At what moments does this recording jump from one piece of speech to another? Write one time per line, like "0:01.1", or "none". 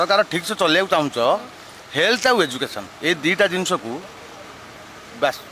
none